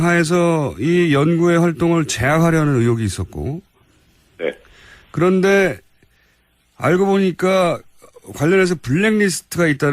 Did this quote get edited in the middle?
yes; 1 cut; at 8.5 s

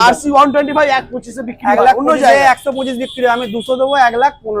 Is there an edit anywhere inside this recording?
no; 0 cuts

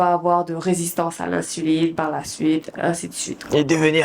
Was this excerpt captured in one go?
yes; 0 cuts

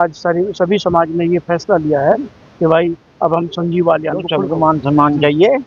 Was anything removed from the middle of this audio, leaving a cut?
yes; 1 cut; at 4.3 s

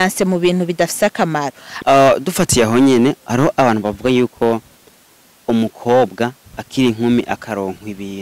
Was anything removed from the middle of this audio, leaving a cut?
yes; 1 cut; at 1.6 s

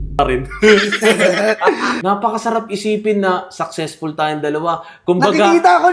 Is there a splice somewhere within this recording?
yes; 1 cut; at 1.9 s

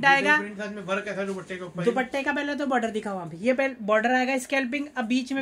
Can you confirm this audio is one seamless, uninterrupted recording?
yes; 0 cuts

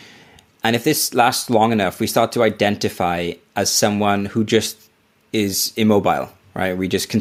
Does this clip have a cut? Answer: no; 0 cuts

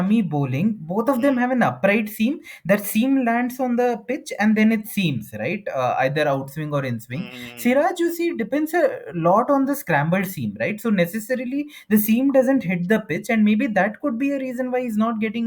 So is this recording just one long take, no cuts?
yes; 0 cuts

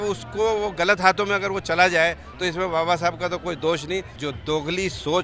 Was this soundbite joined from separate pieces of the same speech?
yes; 1 cut; at 4.1 s

